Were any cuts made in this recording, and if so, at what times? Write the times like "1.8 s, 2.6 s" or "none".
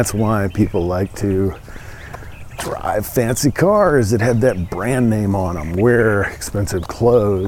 none

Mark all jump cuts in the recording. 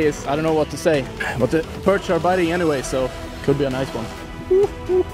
1.0 s

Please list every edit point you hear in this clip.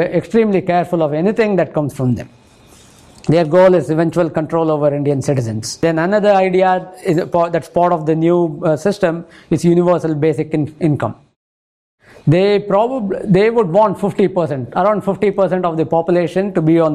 5.8 s

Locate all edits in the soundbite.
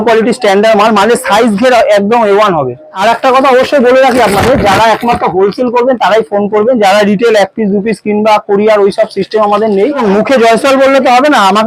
2.8 s, 9.9 s

